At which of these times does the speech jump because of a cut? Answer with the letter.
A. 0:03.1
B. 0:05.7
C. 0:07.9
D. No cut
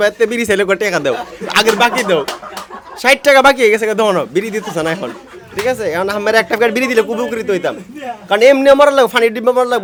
D